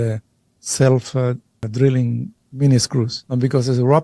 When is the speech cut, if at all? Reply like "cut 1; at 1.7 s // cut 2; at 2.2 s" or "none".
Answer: cut 1; at 1.6 s // cut 2; at 2.4 s